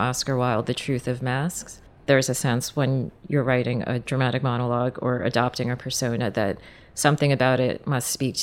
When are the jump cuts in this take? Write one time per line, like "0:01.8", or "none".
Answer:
0:01.9